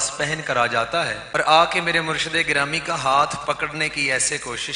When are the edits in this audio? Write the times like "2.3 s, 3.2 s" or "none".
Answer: 1.2 s